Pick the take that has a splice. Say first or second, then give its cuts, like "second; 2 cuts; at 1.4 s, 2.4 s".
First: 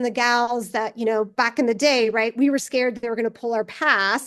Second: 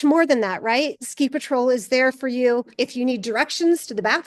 second; 2 cuts; at 0.9 s, 2.7 s